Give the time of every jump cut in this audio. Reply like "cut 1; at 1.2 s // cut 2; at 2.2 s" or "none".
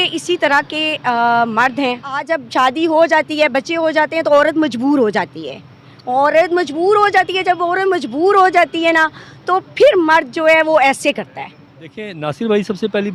cut 1; at 2.3 s // cut 2; at 12.1 s